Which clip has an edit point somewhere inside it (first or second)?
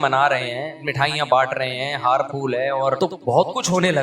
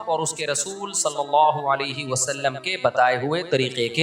first